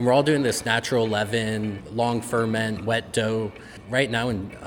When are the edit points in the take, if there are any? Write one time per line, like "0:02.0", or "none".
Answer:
0:01.8
0:03.7